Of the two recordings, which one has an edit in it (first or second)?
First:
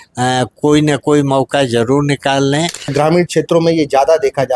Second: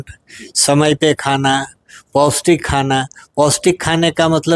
first